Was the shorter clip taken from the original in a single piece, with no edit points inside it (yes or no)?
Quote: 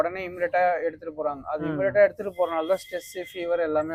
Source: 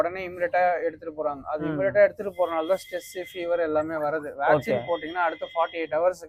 yes